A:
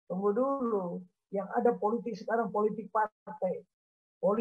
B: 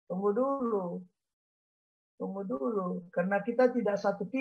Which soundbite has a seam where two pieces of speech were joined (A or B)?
A